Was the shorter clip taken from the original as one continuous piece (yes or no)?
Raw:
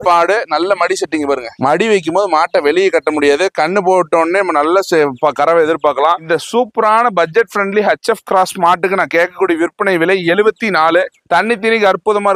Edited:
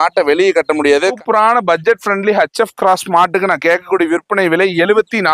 no